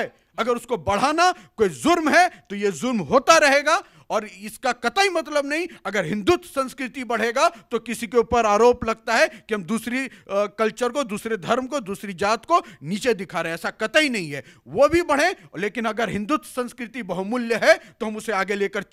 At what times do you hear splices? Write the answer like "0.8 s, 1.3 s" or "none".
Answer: none